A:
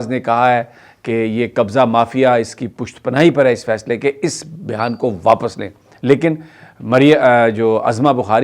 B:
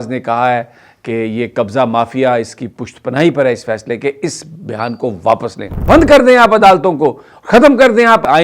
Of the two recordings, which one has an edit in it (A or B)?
B